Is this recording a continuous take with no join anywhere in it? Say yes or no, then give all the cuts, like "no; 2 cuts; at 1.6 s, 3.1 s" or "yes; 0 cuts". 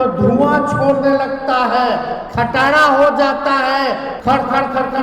no; 1 cut; at 4.1 s